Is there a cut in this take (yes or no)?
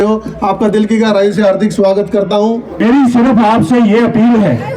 yes